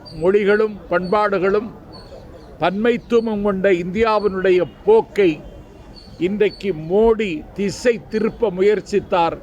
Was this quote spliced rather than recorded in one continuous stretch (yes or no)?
no